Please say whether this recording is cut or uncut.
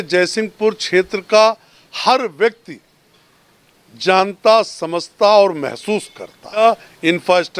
cut